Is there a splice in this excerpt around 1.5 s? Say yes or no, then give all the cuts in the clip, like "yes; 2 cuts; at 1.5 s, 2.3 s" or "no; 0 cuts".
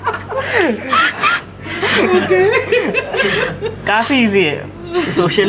no; 0 cuts